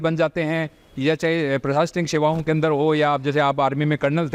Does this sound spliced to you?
no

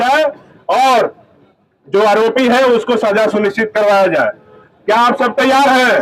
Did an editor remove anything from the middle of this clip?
no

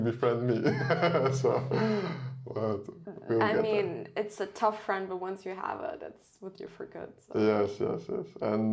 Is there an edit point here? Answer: no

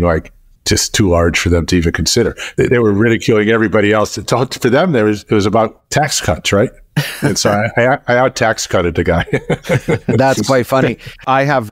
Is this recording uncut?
yes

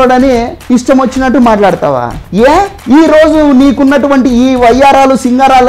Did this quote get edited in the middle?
no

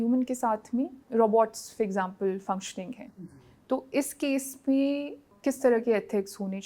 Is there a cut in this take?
yes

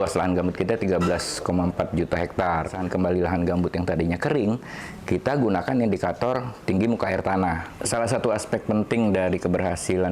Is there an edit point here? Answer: yes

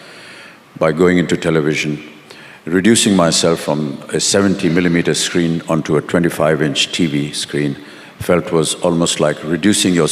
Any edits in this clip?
no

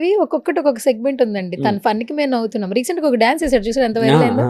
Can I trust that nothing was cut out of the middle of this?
yes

